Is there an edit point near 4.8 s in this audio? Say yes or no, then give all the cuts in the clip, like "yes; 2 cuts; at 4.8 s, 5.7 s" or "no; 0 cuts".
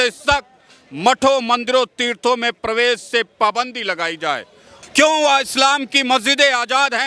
yes; 1 cut; at 4.8 s